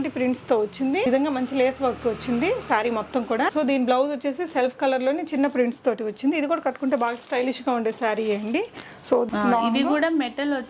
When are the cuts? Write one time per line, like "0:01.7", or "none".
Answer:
0:01.1
0:03.5
0:09.3